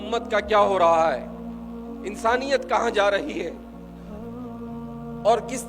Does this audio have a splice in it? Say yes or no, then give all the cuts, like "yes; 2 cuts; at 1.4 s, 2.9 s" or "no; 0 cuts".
yes; 2 cuts; at 3.5 s, 4.9 s